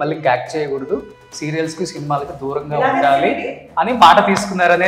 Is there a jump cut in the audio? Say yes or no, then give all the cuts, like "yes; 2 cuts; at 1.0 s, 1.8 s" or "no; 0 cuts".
no; 0 cuts